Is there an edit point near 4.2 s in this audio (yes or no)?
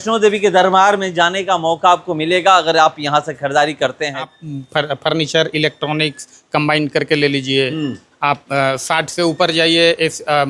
yes